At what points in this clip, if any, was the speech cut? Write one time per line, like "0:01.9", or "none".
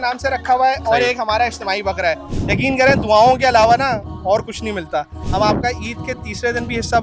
0:02.3
0:05.2